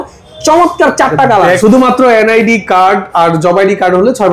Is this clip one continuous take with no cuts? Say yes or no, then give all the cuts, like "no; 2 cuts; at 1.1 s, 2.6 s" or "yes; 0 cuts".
no; 1 cut; at 1.6 s